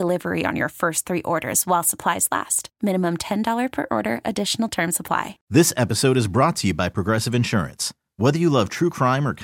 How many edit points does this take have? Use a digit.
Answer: 1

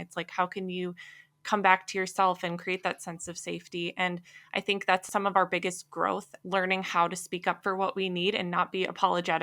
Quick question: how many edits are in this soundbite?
1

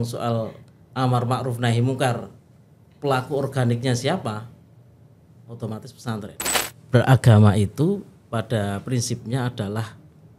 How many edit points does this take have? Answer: 1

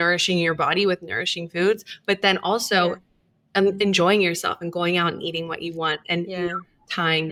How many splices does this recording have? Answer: 0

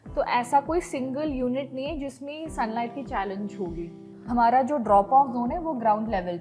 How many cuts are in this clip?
1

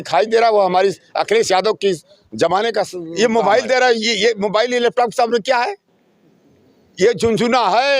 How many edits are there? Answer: 1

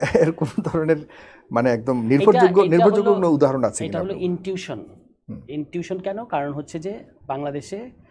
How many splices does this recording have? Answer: 0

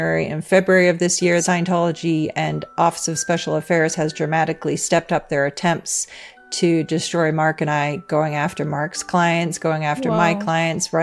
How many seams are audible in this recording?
1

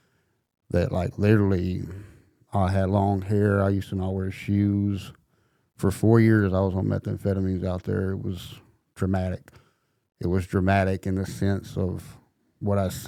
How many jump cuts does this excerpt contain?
0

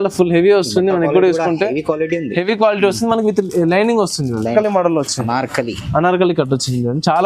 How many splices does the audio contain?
1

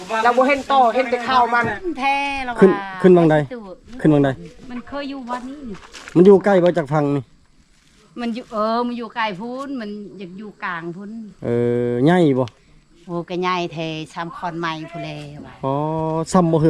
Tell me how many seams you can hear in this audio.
1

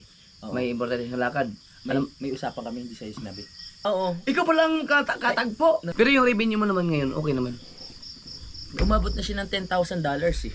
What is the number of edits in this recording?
2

